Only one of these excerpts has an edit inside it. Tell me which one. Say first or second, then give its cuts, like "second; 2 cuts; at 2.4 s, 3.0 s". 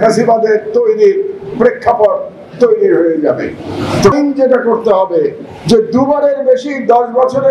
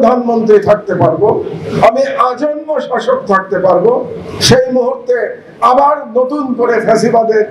first; 1 cut; at 4.1 s